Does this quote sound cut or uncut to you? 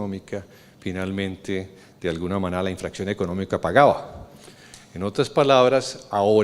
cut